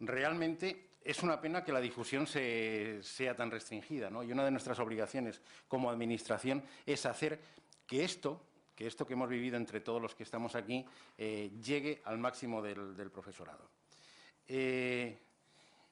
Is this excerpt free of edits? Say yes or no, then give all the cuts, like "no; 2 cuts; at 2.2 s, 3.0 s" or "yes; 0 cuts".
no; 1 cut; at 2.4 s